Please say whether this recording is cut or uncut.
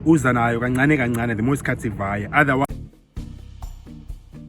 cut